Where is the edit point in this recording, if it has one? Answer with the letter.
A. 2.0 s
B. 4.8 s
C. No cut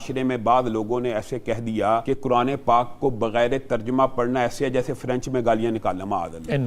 A